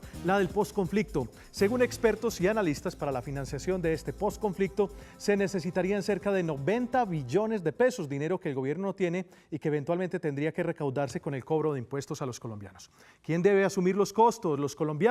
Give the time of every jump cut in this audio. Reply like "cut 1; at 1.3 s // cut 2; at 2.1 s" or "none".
cut 1; at 3.4 s